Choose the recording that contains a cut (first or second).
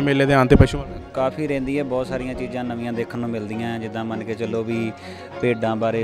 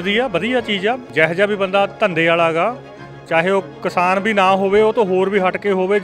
second